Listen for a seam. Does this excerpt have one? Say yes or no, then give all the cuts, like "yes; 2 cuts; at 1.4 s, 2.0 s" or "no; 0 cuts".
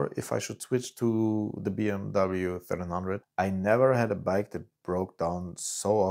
yes; 1 cut; at 3.2 s